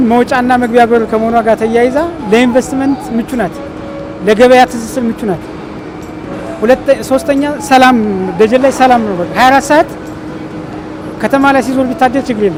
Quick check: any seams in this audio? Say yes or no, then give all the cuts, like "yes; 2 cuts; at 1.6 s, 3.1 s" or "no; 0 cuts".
no; 0 cuts